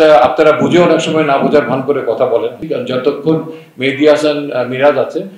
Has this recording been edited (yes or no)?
yes